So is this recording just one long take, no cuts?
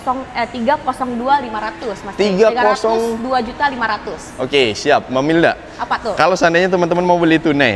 yes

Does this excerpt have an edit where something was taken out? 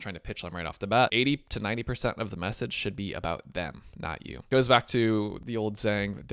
yes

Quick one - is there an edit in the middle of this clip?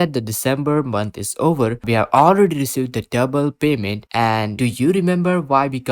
yes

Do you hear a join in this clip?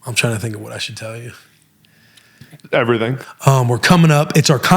yes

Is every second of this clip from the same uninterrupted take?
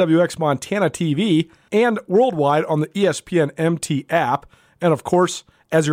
no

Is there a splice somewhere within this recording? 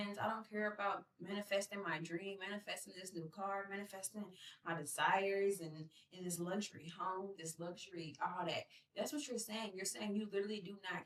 no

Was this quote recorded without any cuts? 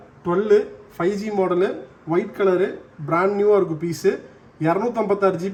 yes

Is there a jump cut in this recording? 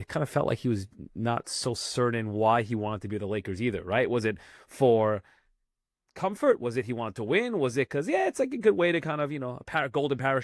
no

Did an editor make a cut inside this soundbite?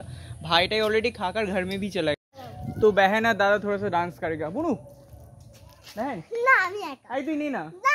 yes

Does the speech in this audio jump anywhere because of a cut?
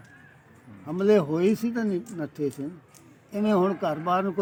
no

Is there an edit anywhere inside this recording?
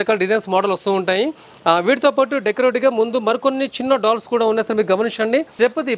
no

